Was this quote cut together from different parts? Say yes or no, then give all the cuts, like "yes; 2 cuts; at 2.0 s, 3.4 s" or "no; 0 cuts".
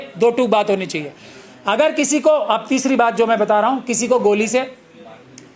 no; 0 cuts